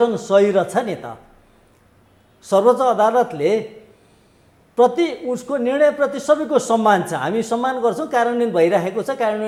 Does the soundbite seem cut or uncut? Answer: uncut